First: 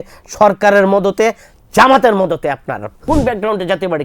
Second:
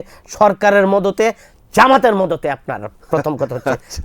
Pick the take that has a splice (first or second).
first